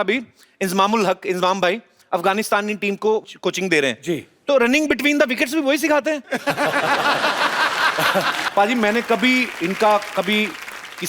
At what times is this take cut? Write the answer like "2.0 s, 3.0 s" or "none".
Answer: 8.4 s